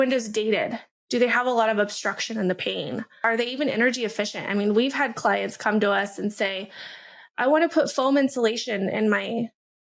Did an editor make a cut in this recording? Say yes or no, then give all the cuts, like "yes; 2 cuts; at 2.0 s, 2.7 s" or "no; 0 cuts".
yes; 1 cut; at 3.2 s